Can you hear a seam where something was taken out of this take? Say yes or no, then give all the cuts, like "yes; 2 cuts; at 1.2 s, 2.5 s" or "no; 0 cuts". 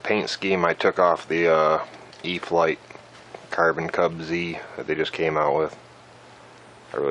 no; 0 cuts